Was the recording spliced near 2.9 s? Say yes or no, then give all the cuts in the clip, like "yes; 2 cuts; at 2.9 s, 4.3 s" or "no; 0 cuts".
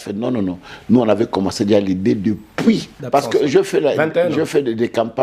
yes; 1 cut; at 2.9 s